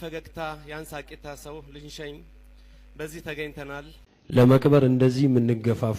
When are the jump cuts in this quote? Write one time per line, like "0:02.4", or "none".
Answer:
0:04.3